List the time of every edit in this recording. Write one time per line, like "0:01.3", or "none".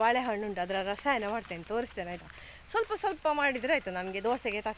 none